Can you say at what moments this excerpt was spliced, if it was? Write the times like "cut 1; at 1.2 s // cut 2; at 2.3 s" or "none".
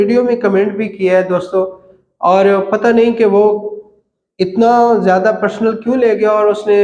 none